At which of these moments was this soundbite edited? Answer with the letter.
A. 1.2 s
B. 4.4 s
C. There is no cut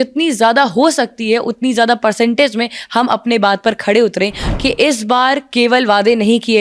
B